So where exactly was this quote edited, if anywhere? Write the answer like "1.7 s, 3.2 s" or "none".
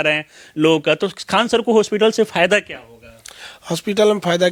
none